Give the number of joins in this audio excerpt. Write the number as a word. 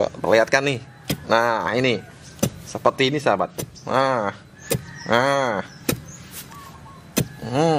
zero